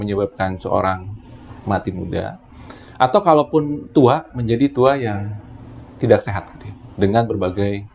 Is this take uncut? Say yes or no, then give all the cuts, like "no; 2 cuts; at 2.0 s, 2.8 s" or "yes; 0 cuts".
yes; 0 cuts